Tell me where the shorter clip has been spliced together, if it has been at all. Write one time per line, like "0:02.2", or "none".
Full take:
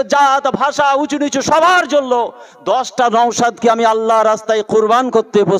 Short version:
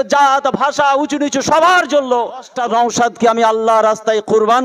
0:02.5